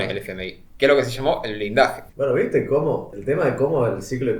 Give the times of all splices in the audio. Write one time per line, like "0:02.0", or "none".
0:02.0
0:03.1